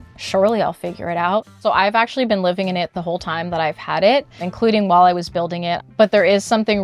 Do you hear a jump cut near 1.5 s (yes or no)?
yes